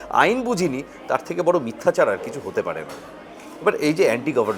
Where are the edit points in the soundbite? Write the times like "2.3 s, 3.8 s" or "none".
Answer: none